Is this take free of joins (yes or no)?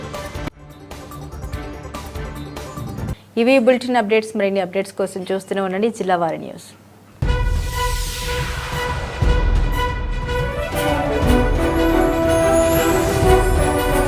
yes